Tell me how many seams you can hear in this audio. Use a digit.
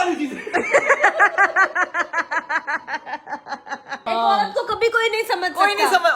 1